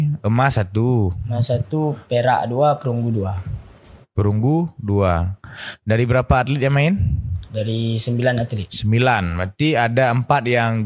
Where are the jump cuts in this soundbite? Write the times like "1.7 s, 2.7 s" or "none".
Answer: none